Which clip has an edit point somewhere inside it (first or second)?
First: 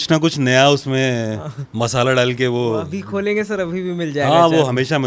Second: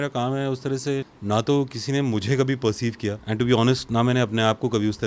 second